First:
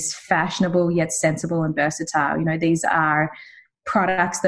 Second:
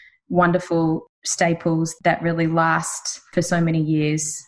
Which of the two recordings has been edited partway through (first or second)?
second